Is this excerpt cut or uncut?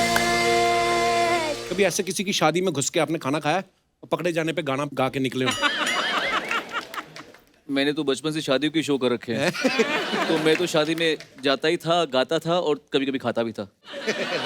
cut